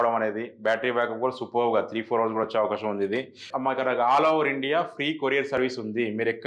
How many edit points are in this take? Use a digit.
1